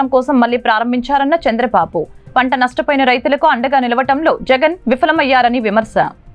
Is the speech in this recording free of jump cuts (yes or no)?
yes